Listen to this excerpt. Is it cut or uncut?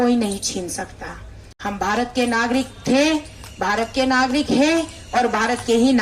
uncut